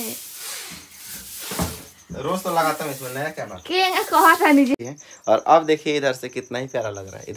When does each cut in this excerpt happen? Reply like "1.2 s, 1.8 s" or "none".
4.8 s